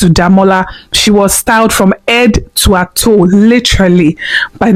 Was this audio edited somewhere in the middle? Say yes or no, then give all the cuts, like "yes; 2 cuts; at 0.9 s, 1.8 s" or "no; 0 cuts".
no; 0 cuts